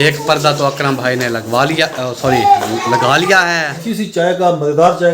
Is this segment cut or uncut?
cut